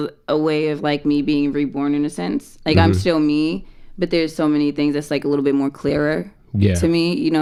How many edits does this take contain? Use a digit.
0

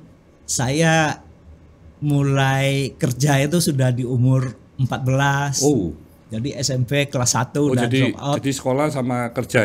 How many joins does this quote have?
0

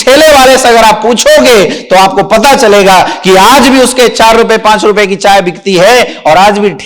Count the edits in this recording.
0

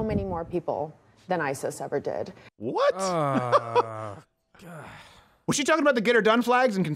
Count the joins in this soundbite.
0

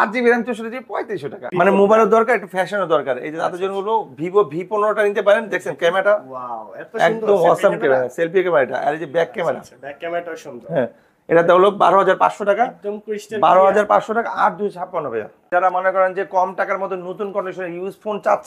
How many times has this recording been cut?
2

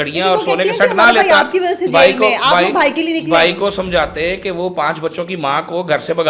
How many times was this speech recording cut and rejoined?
0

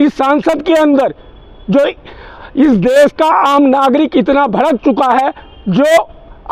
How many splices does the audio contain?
0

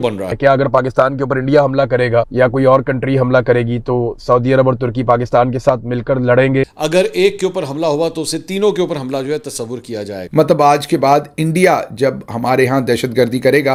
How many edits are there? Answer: 0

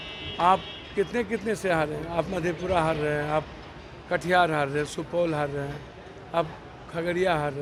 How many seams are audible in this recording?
0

